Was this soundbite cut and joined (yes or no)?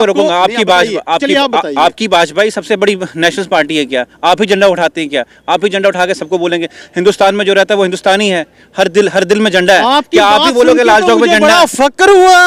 no